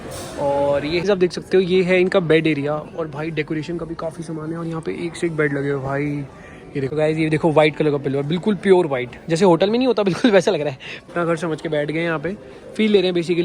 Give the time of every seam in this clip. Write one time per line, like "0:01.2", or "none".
0:01.0
0:06.9
0:11.1